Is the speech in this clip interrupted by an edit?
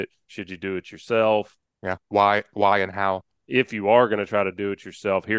no; 0 cuts

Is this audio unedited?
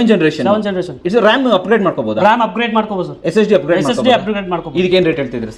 yes; 0 cuts

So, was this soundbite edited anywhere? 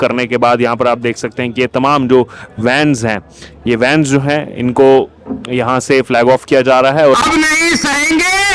yes; 1 cut; at 7.2 s

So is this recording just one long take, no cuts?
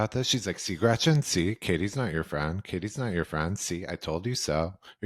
yes; 0 cuts

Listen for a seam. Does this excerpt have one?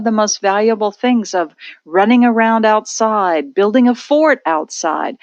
no; 0 cuts

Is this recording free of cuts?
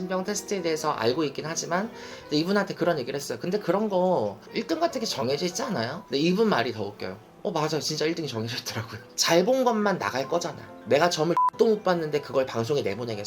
no; 2 cuts; at 6.0 s, 9.1 s

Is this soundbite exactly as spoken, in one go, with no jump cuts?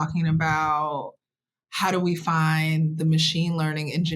yes; 0 cuts

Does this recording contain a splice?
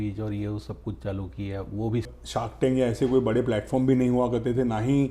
yes; 1 cut; at 2.2 s

